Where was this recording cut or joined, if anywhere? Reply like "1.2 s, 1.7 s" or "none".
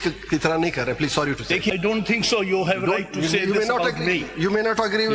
1.7 s